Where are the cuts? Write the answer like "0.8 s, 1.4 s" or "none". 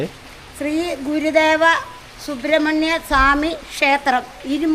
none